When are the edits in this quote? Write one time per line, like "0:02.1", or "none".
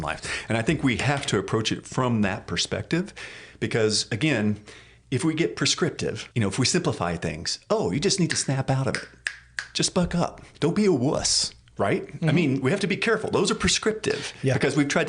0:06.2
0:10.4

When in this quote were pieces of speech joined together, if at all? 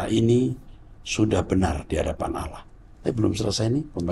none

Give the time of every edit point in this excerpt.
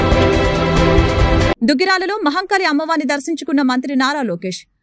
none

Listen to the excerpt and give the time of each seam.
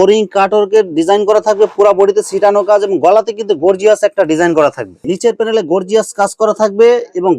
0:05.1

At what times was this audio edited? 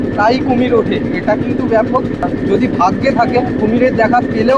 0:02.3
0:03.5

